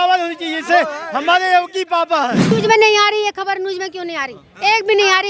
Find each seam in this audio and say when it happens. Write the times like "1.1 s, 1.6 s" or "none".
2.4 s